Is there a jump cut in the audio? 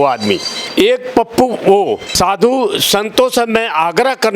yes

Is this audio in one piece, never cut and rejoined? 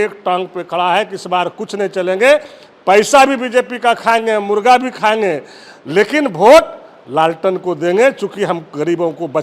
yes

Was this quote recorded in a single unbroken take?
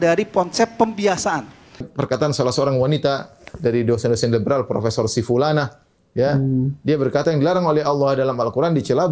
no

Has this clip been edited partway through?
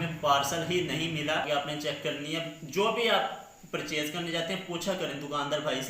yes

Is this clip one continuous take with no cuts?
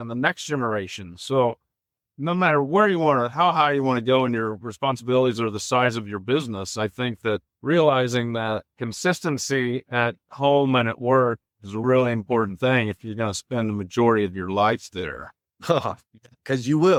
yes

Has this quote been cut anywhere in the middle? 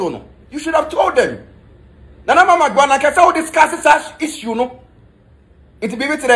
no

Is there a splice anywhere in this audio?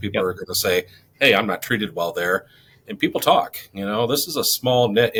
no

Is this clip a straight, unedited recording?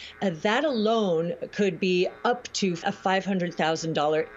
no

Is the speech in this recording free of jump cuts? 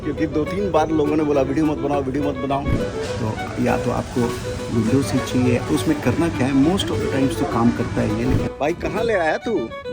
no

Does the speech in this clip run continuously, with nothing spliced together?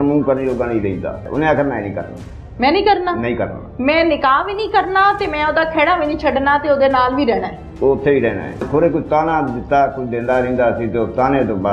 no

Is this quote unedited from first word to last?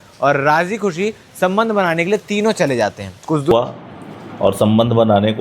no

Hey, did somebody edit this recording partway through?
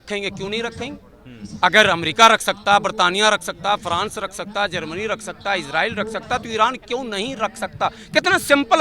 no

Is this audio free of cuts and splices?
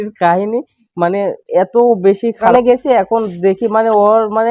no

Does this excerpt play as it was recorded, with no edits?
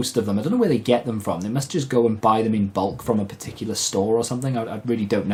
yes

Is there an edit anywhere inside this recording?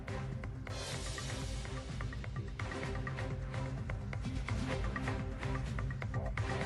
yes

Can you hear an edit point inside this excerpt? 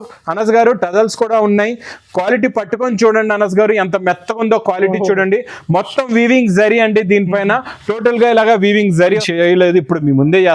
yes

